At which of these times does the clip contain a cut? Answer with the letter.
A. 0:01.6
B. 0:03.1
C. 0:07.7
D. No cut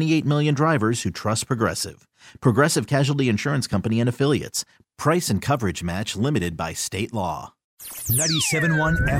C